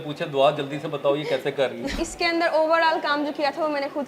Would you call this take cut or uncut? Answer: cut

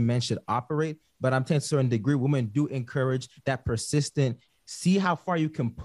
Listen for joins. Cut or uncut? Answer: cut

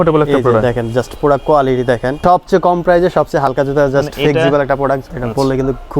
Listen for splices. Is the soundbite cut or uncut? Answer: cut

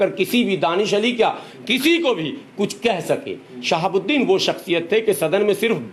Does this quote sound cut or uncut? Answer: uncut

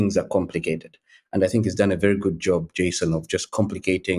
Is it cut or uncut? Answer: uncut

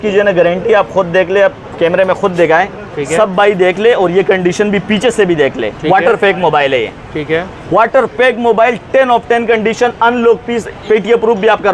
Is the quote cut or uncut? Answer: uncut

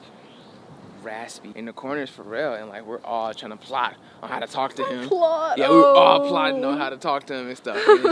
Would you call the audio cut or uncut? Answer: cut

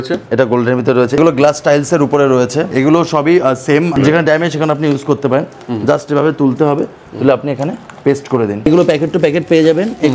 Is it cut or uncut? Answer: cut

